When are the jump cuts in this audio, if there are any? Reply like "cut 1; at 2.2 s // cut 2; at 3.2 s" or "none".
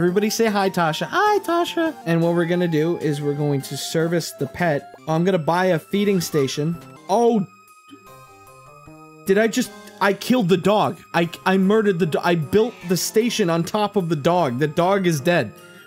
none